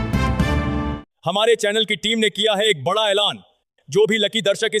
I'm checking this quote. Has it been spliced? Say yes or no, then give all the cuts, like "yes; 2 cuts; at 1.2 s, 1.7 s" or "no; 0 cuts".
yes; 1 cut; at 0.9 s